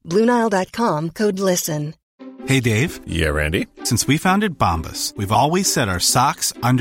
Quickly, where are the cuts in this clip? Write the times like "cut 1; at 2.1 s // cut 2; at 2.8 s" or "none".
cut 1; at 2.0 s